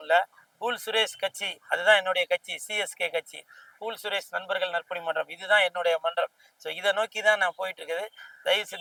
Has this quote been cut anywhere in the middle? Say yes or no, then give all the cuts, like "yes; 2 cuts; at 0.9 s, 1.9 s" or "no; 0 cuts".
no; 0 cuts